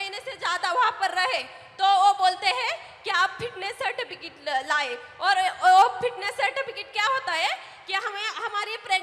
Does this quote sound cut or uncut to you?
uncut